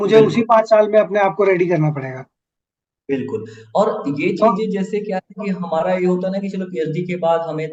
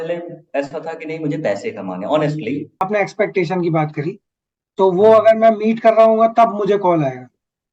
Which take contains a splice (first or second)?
second